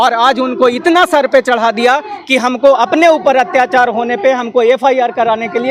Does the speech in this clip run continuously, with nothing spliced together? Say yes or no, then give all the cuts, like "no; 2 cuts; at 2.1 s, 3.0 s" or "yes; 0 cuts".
yes; 0 cuts